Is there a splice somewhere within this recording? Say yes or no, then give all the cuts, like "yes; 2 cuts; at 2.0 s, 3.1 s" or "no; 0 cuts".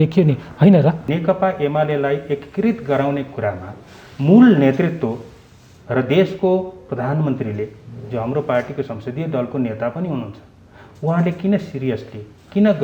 yes; 1 cut; at 1.0 s